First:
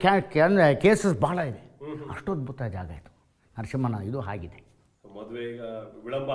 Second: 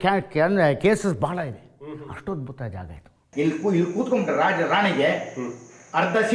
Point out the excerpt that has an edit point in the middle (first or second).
second